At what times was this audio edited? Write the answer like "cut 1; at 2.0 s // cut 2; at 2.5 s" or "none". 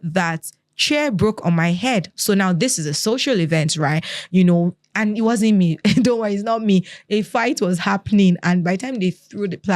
none